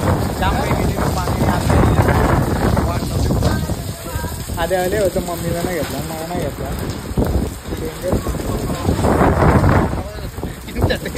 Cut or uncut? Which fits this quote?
uncut